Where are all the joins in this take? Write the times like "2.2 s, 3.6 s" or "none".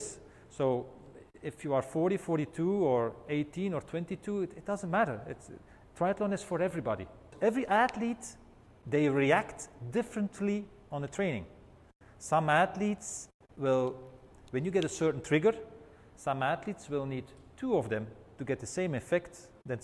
7.3 s